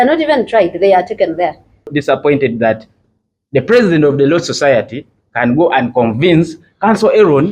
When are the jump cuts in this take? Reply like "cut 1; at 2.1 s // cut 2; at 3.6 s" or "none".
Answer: cut 1; at 1.9 s